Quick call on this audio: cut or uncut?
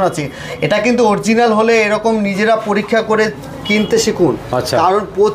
uncut